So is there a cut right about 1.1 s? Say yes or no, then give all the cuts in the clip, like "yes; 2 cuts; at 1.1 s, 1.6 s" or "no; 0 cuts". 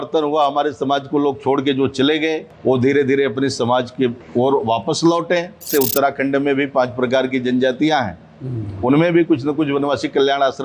no; 3 cuts; at 2.5 s, 4.2 s, 5.7 s